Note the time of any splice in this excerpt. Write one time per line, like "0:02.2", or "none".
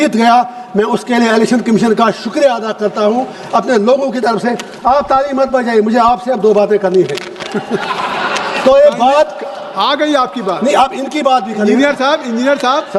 none